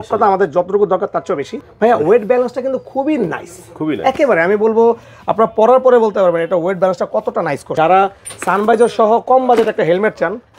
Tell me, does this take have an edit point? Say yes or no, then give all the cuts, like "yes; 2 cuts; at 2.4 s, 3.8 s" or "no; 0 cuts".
yes; 2 cuts; at 1.6 s, 7.7 s